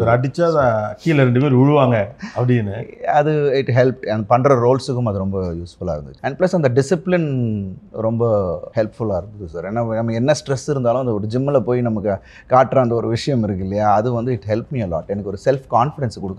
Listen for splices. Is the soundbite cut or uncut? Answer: cut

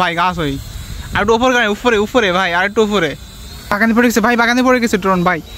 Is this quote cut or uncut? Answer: cut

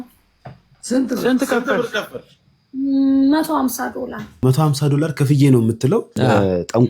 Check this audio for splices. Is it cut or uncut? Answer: cut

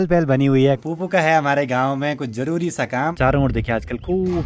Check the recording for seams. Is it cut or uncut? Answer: cut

